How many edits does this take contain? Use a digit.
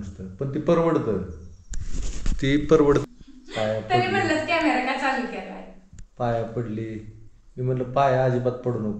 1